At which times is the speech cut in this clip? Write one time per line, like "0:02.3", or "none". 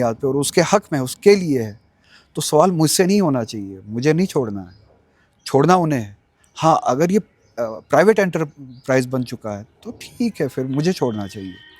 none